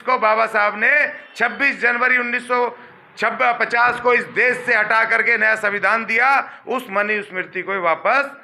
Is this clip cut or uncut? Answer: uncut